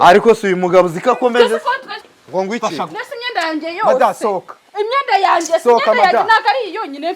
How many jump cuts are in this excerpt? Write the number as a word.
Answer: one